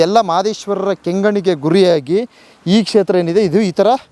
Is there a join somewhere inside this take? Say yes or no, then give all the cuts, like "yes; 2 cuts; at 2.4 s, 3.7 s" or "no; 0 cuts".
no; 0 cuts